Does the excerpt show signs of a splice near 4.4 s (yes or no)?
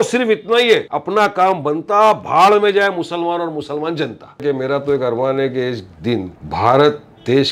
yes